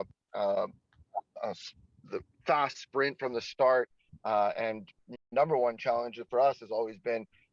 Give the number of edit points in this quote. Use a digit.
1